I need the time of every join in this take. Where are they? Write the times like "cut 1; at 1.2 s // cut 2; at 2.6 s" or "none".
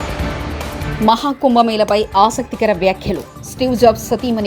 cut 1; at 0.9 s